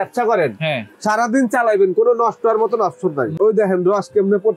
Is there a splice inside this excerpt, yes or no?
yes